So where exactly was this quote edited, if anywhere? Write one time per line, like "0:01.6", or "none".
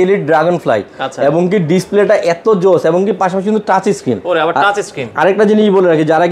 none